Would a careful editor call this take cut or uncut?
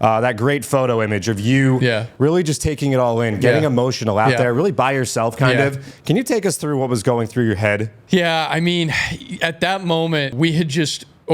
cut